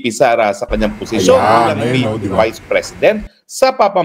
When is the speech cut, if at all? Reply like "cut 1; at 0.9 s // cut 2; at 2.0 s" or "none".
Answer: none